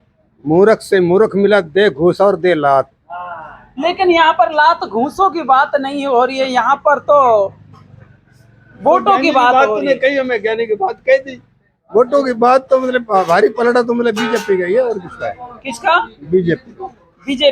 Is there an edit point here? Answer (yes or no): no